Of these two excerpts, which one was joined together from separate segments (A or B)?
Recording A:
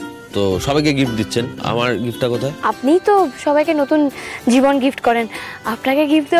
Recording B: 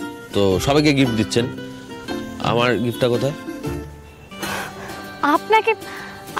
A